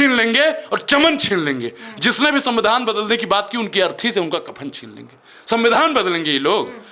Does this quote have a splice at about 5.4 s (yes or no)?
no